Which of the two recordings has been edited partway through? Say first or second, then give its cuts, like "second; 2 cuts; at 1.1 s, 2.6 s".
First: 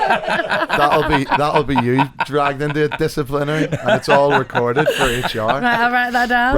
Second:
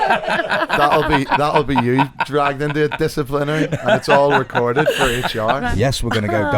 second; 1 cut; at 5.7 s